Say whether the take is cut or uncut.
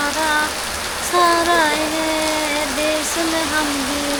uncut